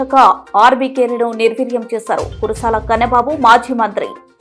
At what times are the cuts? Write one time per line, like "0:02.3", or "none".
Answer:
none